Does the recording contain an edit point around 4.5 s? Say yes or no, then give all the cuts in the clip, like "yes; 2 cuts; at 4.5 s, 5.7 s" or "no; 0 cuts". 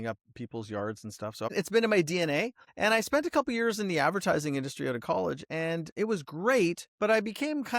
no; 4 cuts; at 1.5 s, 2.6 s, 5.9 s, 6.9 s